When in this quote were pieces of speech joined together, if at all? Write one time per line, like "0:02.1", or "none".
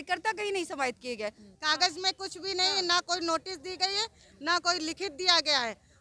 0:01.5